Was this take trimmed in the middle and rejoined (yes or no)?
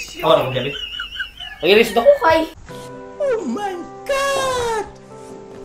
yes